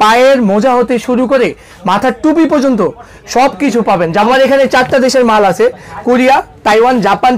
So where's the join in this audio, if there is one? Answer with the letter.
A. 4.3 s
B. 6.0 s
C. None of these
A